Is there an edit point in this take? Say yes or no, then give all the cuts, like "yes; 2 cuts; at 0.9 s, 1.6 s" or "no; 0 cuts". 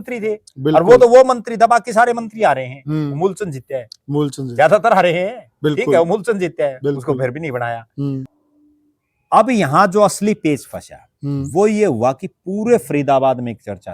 yes; 1 cut; at 8.3 s